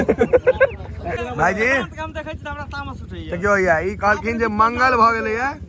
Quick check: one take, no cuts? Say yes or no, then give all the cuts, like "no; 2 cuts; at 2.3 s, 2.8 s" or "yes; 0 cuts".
no; 1 cut; at 1.0 s